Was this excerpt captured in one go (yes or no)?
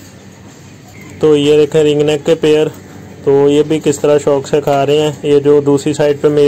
no